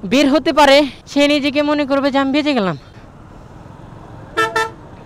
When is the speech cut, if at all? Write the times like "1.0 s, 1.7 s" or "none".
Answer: 1.0 s, 2.9 s